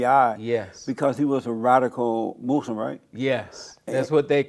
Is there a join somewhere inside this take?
no; 0 cuts

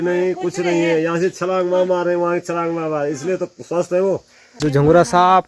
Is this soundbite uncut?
no; 1 cut; at 4.4 s

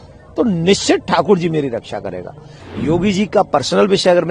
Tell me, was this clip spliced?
yes; 1 cut; at 2.5 s

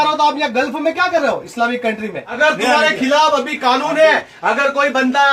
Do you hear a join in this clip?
yes; 1 cut; at 2.4 s

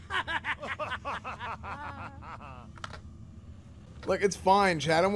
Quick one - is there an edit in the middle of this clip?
no; 0 cuts

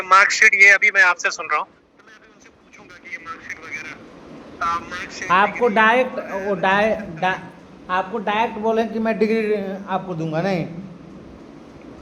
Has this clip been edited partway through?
no; 0 cuts

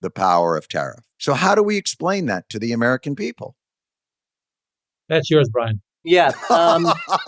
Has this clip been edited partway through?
yes; 1 cut; at 1.0 s

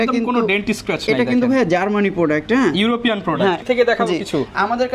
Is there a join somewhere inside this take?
yes; 1 cut; at 3.6 s

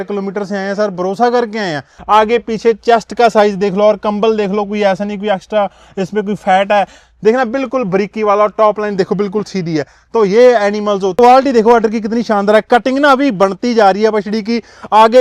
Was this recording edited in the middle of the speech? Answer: yes; 2 cuts; at 1.9 s, 11.1 s

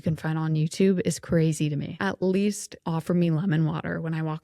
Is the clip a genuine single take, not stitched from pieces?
no; 2 cuts; at 1.9 s, 2.7 s

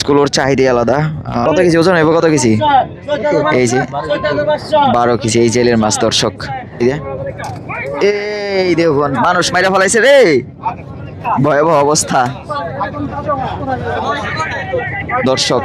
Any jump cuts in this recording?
yes; 2 cuts; at 1.4 s, 6.8 s

